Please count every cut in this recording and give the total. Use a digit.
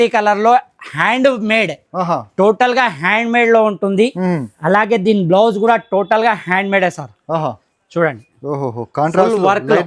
0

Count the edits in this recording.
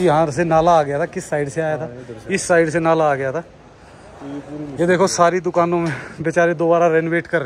0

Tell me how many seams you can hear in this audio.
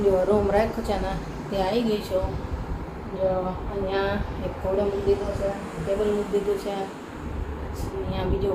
0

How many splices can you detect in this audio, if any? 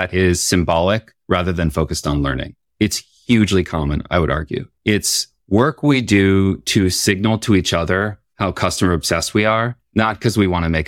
5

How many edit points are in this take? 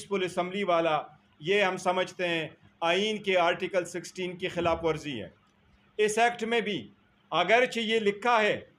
0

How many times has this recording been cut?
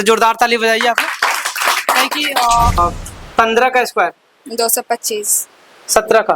1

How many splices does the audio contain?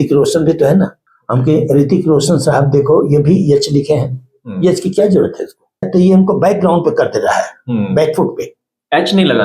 2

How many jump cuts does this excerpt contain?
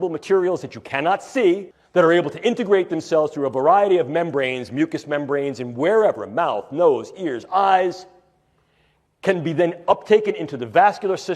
1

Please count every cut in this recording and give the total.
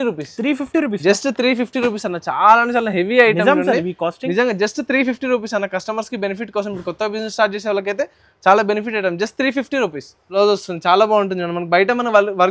1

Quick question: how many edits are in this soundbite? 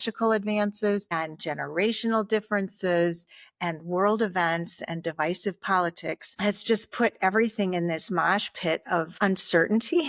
1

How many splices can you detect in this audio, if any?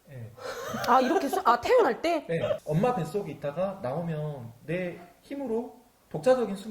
1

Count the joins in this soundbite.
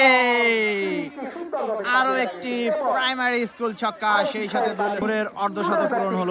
1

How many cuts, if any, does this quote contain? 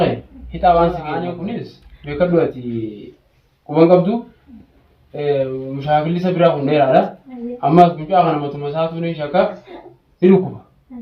1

